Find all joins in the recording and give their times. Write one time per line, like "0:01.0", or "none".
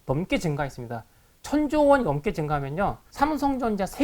0:03.0

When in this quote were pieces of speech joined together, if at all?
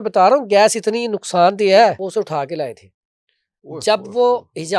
0:02.0

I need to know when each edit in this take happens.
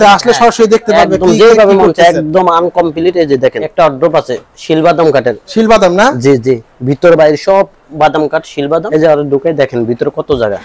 0:03.6
0:08.9

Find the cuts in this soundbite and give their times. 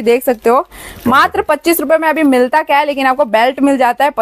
none

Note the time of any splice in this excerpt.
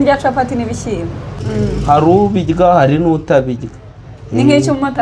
0:01.4

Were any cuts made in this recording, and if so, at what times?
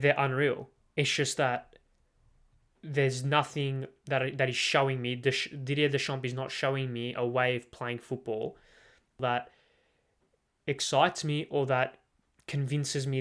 0:09.2

